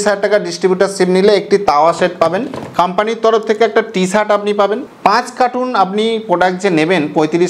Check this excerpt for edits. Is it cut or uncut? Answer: cut